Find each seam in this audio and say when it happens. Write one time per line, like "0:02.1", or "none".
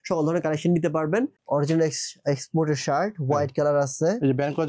0:01.4